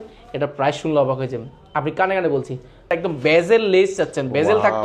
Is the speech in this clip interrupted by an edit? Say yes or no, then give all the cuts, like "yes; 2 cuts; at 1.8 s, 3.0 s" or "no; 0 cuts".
yes; 1 cut; at 2.9 s